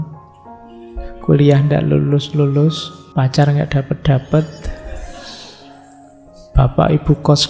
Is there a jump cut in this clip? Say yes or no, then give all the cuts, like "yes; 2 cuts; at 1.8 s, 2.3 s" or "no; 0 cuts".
yes; 1 cut; at 2.9 s